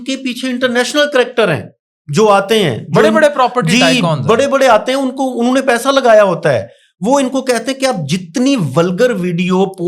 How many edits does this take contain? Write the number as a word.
zero